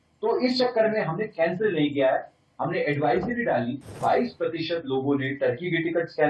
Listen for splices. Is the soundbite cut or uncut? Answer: cut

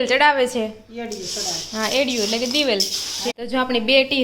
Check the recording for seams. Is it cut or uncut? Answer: cut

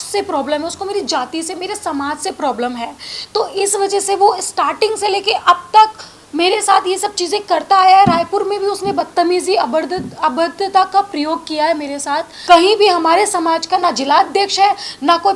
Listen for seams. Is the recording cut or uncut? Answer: cut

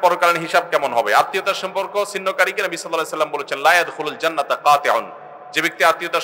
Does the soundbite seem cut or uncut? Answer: uncut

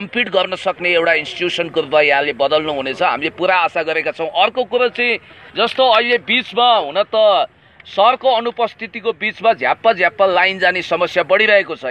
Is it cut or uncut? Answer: uncut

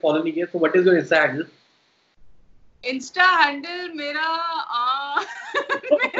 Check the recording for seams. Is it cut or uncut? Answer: uncut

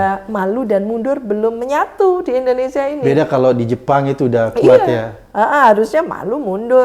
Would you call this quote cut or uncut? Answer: uncut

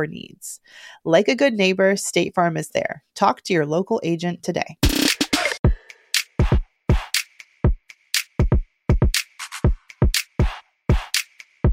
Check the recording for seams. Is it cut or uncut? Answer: cut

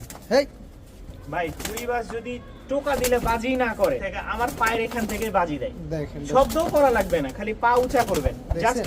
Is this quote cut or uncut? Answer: cut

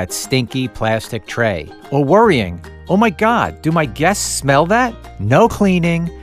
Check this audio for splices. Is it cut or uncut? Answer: cut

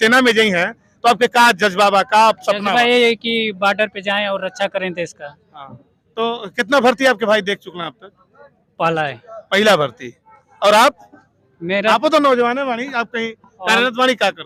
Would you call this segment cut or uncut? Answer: uncut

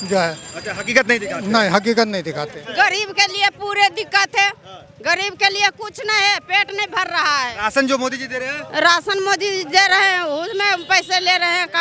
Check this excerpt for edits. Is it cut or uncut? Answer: cut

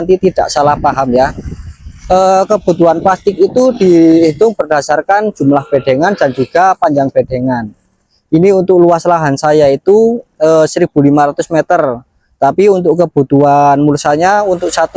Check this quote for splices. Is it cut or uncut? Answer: uncut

